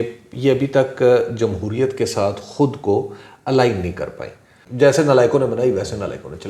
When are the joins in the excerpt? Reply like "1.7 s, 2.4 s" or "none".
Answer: none